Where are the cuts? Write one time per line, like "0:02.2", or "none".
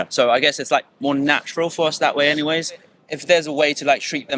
0:03.0